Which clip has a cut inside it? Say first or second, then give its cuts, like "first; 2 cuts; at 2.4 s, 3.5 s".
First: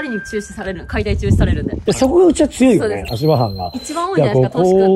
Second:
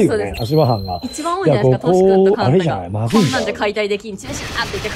first; 1 cut; at 1.7 s